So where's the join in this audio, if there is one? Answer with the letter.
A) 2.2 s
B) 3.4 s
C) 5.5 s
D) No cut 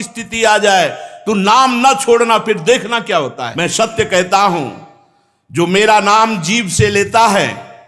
B